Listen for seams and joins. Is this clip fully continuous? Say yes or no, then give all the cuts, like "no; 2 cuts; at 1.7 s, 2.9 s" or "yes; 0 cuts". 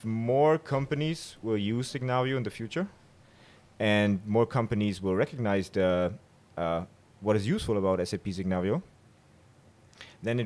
yes; 0 cuts